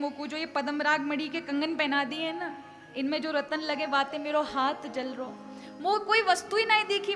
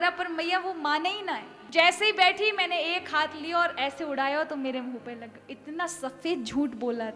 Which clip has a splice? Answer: second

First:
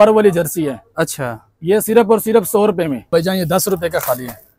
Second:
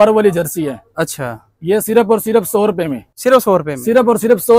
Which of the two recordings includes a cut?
first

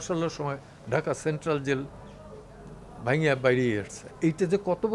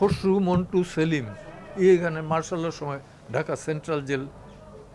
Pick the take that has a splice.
first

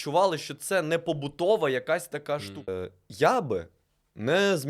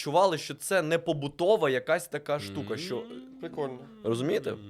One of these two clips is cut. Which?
first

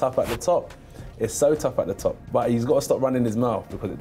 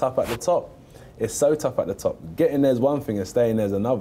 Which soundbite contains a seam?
first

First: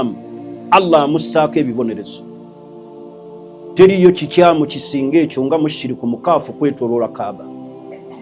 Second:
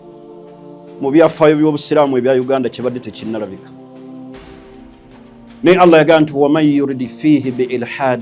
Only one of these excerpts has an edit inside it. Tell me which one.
second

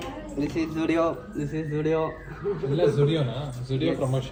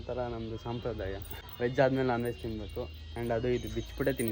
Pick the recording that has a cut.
second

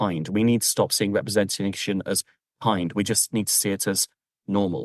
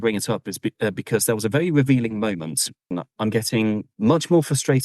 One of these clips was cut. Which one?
second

